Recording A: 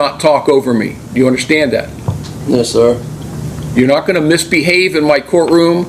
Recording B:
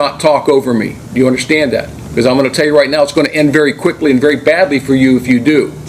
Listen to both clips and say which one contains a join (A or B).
B